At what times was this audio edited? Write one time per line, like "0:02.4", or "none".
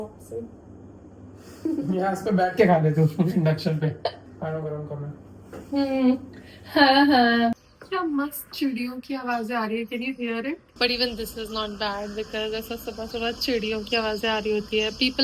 0:04.2
0:07.5
0:10.8